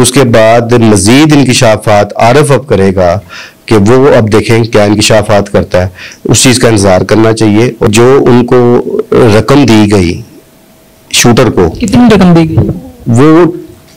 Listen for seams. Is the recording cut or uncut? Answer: cut